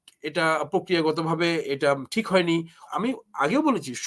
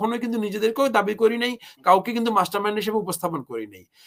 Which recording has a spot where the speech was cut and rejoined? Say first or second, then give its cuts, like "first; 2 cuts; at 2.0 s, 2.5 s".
first; 1 cut; at 2.8 s